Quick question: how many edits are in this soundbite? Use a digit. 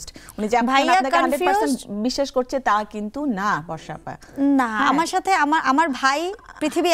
0